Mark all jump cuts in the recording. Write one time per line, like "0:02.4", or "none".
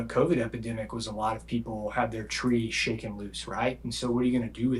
none